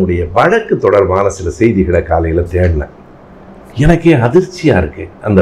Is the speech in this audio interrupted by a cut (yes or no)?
no